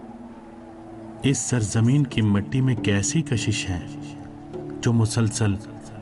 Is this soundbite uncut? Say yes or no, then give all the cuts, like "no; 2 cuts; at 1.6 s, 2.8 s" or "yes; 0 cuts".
yes; 0 cuts